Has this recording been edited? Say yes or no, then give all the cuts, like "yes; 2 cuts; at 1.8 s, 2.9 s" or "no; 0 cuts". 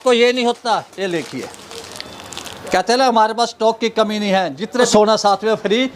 yes; 1 cut; at 4.9 s